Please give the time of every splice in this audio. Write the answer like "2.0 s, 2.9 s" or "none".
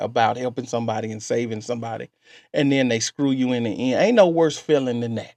none

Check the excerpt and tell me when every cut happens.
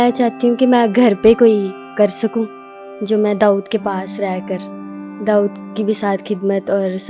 none

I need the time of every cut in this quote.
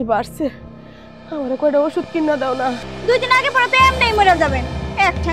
2.9 s

